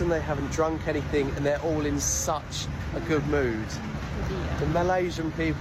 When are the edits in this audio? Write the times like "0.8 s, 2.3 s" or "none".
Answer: none